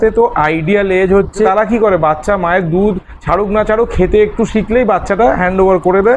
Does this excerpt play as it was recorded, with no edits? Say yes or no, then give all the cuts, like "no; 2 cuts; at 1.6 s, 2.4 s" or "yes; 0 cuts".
no; 1 cut; at 1.5 s